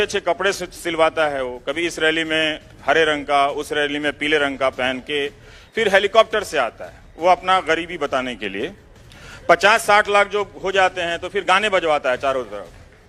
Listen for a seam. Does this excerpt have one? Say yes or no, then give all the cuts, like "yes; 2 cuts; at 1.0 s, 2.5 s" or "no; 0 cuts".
no; 0 cuts